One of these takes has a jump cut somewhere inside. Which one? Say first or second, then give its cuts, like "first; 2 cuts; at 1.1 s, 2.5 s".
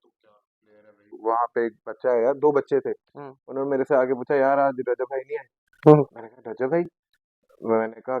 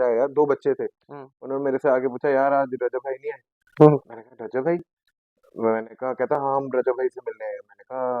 first; 1 cut; at 1.1 s